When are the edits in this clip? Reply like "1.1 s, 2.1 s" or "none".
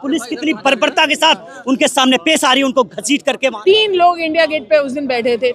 3.6 s